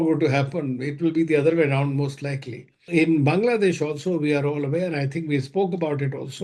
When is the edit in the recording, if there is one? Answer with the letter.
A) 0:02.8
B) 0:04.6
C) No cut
A